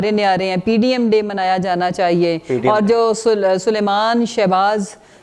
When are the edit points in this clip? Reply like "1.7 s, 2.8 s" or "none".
none